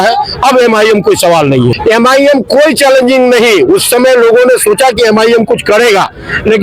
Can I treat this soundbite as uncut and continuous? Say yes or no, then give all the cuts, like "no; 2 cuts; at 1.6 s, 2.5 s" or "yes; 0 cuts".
no; 1 cut; at 1.8 s